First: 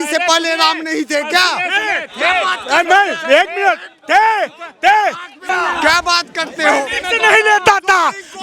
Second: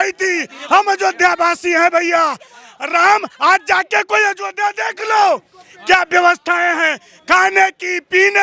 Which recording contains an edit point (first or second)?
first